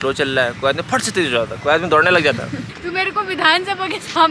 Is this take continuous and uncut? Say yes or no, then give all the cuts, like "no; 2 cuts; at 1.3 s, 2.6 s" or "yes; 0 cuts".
no; 1 cut; at 2.6 s